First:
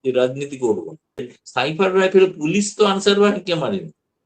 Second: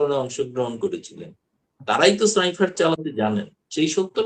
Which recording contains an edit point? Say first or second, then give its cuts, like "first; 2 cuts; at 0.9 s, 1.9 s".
first; 1 cut; at 1.4 s